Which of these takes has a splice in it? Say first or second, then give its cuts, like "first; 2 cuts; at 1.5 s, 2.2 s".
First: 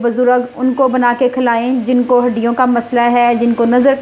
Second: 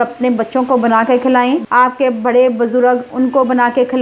second; 1 cut; at 1.6 s